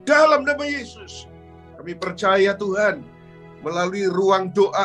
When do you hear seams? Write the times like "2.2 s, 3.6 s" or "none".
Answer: none

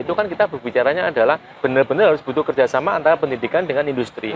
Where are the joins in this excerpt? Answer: 1.5 s

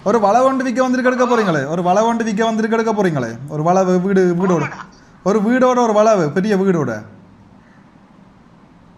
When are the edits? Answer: none

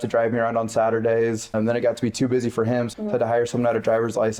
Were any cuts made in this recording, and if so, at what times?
1.5 s, 2.9 s

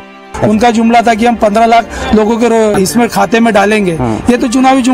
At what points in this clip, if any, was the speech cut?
2.7 s

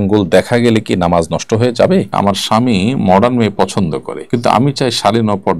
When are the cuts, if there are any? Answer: 2.1 s, 4.1 s

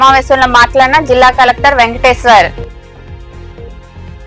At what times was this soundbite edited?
none

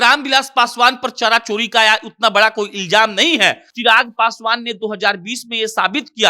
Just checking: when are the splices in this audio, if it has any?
3.7 s

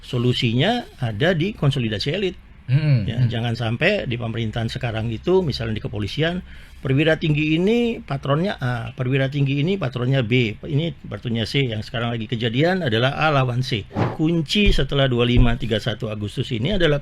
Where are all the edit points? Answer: 14.0 s

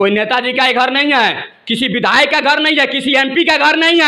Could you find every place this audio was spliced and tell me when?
none

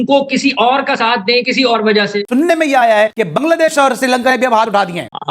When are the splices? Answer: 2.2 s

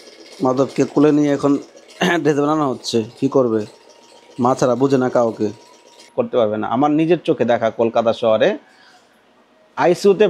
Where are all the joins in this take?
6.1 s

